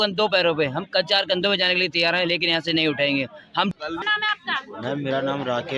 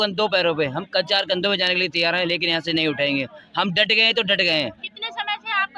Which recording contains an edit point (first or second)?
first